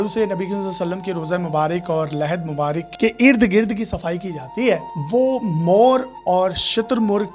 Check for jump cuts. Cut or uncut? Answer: uncut